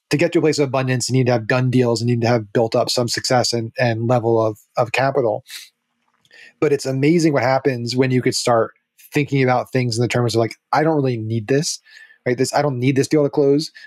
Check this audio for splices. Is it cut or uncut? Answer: uncut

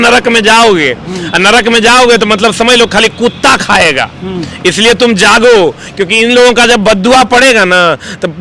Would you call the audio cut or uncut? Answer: uncut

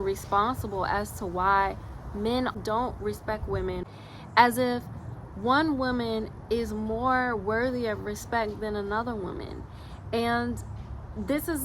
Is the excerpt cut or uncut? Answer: cut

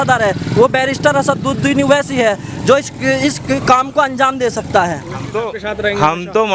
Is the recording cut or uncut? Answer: cut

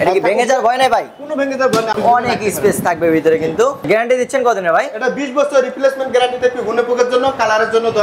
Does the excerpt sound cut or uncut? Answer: cut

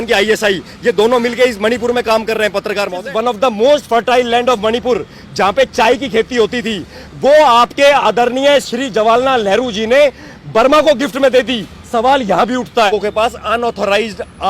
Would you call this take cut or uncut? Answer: cut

